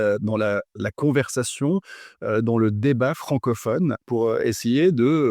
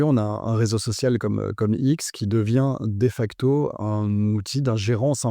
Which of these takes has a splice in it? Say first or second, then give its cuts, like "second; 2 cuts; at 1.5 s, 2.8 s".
first; 1 cut; at 4.0 s